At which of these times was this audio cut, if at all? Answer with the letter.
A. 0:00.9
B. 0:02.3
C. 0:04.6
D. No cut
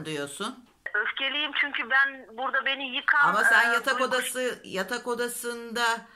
A